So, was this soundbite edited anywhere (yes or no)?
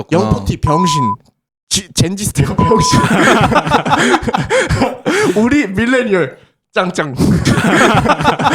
yes